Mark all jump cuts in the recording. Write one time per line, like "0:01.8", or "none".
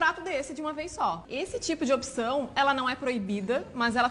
0:01.3